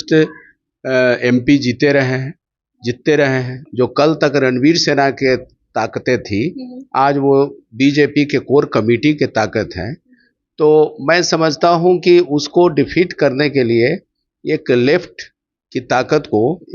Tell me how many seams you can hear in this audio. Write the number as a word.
one